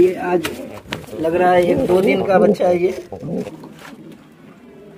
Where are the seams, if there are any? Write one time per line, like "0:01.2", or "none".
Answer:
0:03.5